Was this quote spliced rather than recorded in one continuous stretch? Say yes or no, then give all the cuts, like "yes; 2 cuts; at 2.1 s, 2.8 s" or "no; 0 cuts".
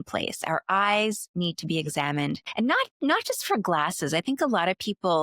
yes; 1 cut; at 2.5 s